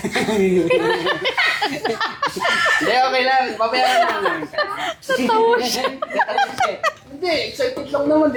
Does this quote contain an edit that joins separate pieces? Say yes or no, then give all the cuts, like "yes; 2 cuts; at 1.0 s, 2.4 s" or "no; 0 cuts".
no; 0 cuts